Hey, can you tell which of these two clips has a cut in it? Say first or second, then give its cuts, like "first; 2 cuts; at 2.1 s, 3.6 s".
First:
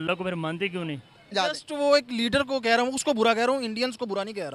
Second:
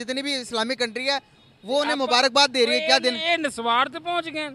first; 1 cut; at 1.3 s